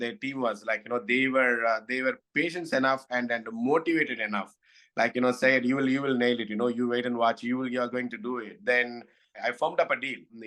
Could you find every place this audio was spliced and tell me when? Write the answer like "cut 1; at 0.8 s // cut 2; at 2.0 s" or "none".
cut 1; at 9.5 s